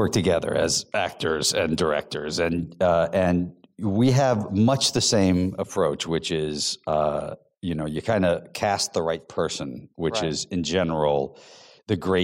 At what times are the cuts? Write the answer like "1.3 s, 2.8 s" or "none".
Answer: none